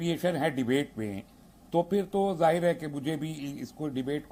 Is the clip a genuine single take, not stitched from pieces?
yes; 0 cuts

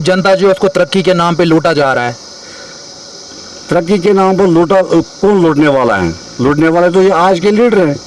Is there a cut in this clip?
no; 0 cuts

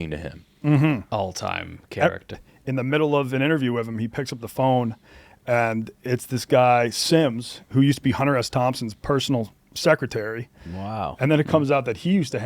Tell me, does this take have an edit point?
yes; 1 cut; at 2.3 s

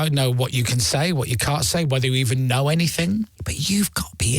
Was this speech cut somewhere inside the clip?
yes; 1 cut; at 3.3 s

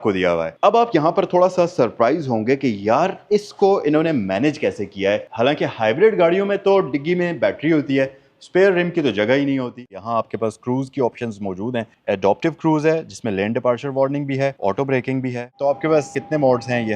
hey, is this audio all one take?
no; 2 cuts; at 9.8 s, 15.5 s

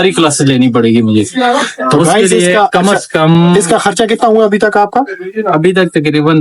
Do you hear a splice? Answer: no; 0 cuts

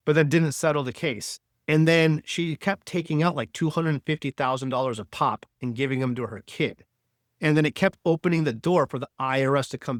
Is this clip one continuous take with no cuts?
yes; 0 cuts

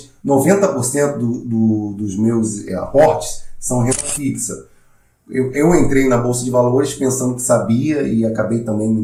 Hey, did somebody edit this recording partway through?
no; 0 cuts

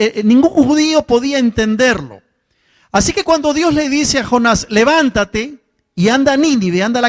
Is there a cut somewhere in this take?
yes; 1 cut; at 4.7 s

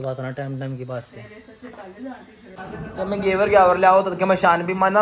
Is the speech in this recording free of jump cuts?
no; 1 cut; at 2.6 s

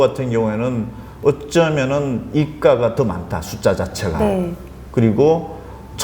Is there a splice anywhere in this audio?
no; 0 cuts

